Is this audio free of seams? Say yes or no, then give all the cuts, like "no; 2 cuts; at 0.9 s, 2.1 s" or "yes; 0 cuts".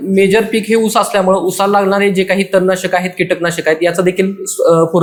yes; 0 cuts